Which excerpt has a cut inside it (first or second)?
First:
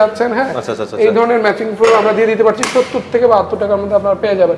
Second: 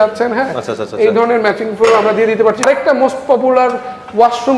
second